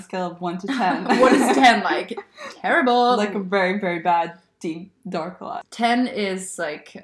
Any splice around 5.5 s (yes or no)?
yes